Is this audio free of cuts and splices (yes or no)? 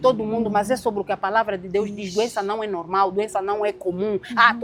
yes